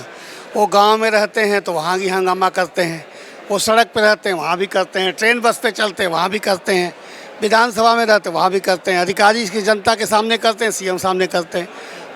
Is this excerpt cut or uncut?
uncut